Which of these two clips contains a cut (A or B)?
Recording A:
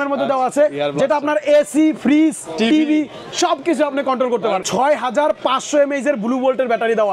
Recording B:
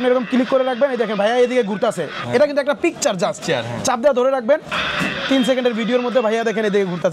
A